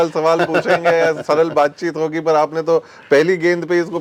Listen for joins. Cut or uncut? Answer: uncut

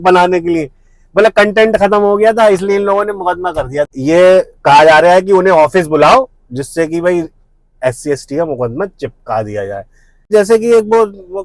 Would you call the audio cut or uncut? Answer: cut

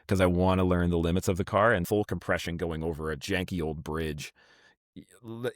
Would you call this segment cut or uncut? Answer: cut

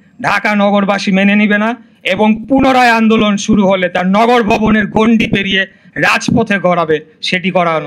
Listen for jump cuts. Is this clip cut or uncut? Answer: uncut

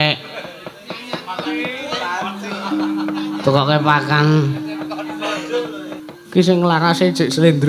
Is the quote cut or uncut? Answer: cut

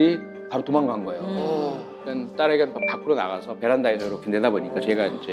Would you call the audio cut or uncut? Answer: uncut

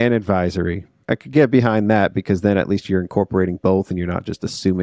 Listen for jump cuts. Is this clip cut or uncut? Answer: cut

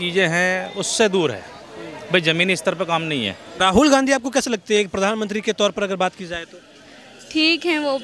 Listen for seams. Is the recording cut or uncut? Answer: cut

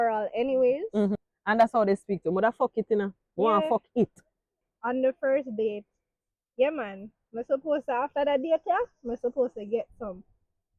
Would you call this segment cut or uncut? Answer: cut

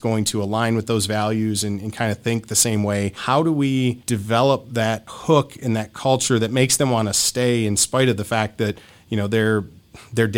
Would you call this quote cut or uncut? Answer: cut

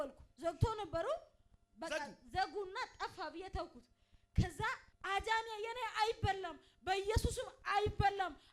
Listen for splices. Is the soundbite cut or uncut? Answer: cut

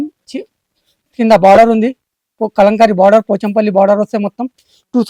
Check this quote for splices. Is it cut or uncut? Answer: uncut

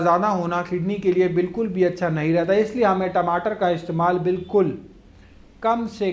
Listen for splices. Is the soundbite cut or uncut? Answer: uncut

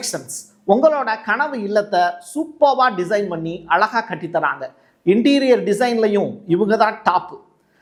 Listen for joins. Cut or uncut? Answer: uncut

